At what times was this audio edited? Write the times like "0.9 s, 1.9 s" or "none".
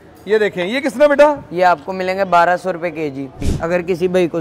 3.5 s